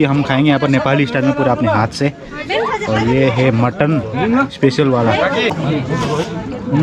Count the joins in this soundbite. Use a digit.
0